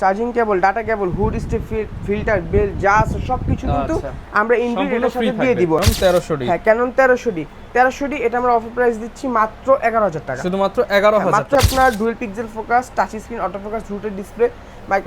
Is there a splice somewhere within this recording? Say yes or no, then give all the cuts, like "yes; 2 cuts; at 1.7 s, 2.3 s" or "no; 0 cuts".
yes; 2 cuts; at 5.8 s, 11.6 s